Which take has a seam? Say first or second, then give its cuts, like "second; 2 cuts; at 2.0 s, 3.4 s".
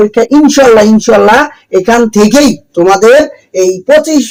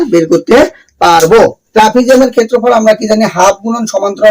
second; 1 cut; at 1.6 s